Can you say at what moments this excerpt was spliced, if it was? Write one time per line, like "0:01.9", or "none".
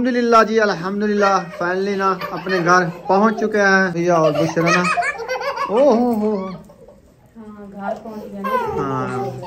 0:04.0